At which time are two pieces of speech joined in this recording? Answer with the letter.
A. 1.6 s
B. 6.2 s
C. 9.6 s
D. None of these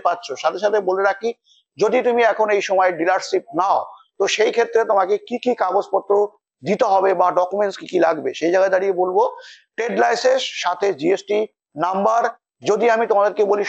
D